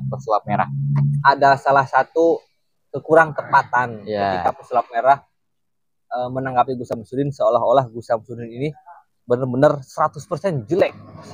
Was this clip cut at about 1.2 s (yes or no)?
yes